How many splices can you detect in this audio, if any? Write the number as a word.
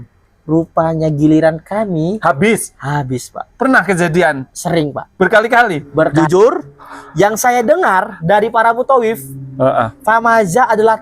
one